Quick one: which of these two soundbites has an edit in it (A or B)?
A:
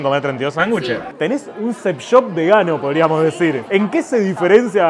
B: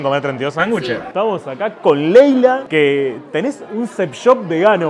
A